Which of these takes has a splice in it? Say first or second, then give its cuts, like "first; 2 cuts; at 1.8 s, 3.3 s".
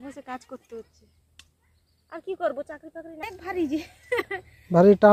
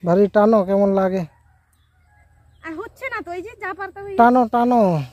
first; 1 cut; at 3.3 s